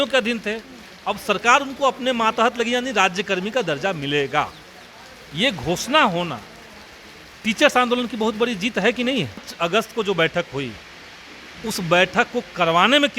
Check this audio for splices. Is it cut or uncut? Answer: cut